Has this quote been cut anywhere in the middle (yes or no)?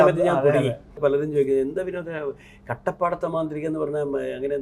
yes